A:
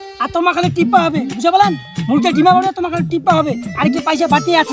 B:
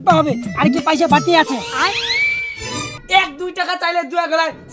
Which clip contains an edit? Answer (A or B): B